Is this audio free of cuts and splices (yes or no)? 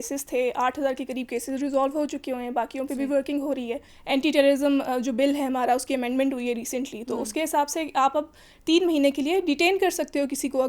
no